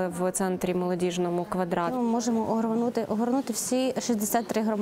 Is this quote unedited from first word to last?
no; 1 cut; at 1.9 s

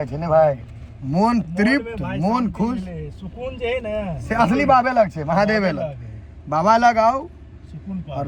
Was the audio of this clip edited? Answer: no; 0 cuts

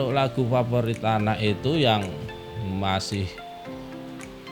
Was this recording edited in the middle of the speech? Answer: no; 0 cuts

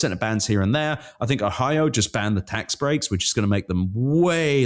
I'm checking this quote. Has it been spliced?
no; 0 cuts

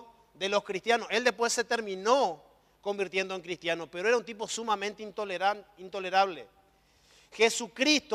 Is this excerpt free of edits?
yes; 0 cuts

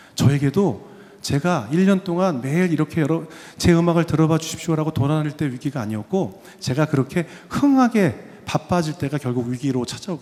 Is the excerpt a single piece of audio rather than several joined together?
yes; 0 cuts

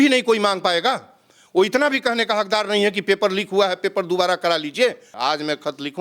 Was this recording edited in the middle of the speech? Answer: yes; 1 cut; at 5.1 s

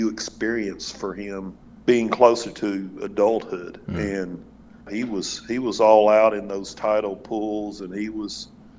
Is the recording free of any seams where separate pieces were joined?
no; 2 cuts; at 1.6 s, 4.9 s

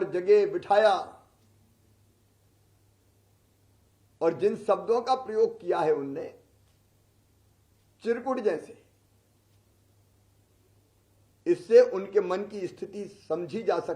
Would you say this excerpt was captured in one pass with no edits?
yes; 0 cuts

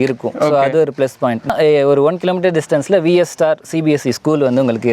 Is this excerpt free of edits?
no; 1 cut; at 1.5 s

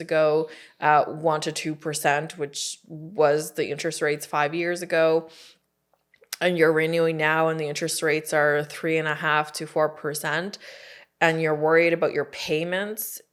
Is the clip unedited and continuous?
yes; 0 cuts

